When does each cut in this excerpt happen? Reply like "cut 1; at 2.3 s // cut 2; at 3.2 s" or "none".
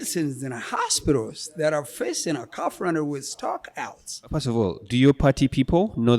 cut 1; at 4.3 s